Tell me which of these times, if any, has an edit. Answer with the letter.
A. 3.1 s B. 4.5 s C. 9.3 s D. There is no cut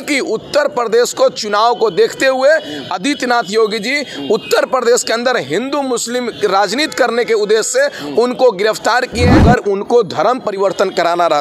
C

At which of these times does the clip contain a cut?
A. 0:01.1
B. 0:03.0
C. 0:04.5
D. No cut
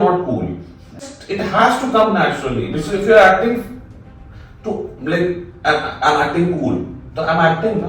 A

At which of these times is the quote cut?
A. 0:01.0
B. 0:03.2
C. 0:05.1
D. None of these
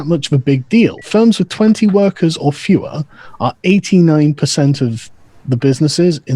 A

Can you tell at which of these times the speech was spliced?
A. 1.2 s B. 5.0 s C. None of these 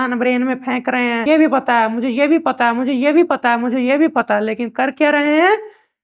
A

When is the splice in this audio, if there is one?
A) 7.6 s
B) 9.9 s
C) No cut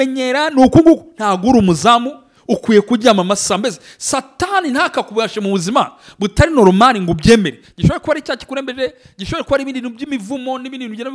A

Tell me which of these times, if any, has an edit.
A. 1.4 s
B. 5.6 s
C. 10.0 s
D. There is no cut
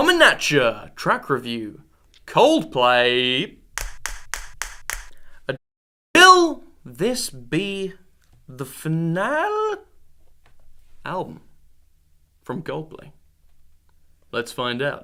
D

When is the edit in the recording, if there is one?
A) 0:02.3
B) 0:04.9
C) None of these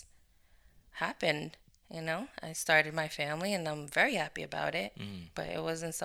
C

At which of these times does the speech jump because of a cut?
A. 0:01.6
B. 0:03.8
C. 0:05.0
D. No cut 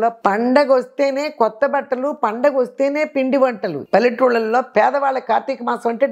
B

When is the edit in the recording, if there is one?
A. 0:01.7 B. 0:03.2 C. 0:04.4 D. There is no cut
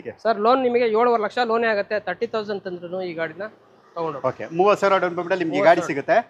D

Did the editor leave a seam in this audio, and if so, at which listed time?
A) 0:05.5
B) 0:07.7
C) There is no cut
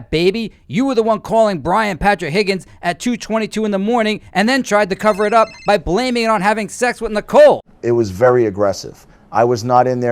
B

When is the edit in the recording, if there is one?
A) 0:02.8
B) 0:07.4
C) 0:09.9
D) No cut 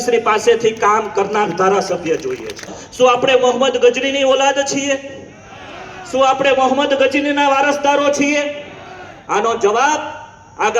A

